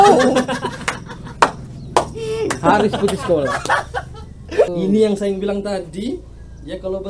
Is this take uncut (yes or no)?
no